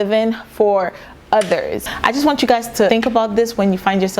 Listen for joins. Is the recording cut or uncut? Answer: cut